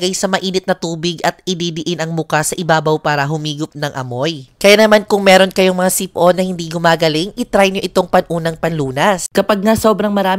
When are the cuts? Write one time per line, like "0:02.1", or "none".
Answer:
0:09.2